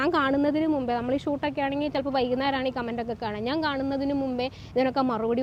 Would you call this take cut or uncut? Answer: uncut